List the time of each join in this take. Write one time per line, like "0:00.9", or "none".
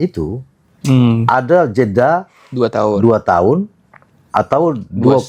none